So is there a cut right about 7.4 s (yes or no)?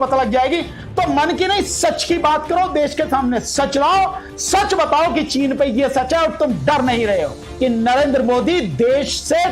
yes